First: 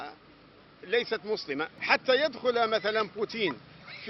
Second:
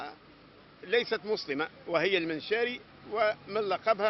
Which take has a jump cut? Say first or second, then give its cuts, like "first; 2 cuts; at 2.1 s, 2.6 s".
first; 1 cut; at 1.8 s